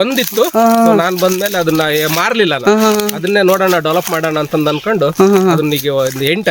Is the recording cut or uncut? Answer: uncut